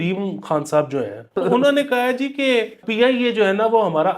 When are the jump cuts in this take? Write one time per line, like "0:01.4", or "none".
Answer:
0:01.3
0:02.8